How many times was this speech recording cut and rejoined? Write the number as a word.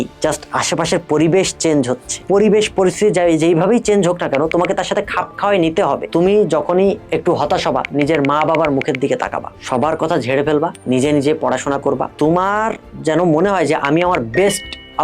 five